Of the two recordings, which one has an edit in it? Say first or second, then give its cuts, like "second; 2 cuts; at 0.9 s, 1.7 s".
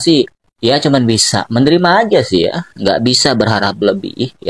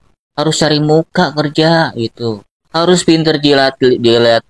second; 1 cut; at 2.5 s